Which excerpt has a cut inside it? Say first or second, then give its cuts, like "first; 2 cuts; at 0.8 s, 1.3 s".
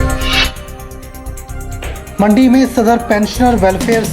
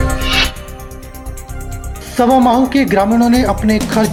first; 1 cut; at 1.7 s